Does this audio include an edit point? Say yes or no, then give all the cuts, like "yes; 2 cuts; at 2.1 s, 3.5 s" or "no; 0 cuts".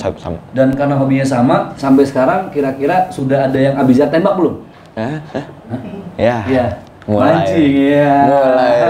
no; 0 cuts